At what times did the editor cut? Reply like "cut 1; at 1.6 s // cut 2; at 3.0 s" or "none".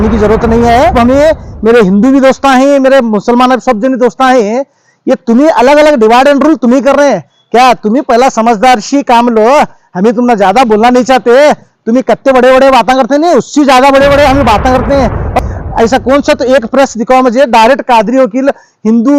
cut 1; at 1.0 s // cut 2; at 15.3 s